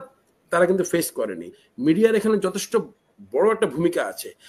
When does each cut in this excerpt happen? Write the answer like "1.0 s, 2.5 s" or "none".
1.6 s